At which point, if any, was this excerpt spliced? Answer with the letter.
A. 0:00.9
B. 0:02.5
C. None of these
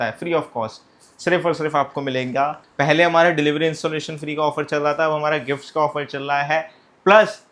B